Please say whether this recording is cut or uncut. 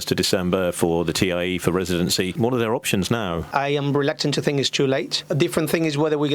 cut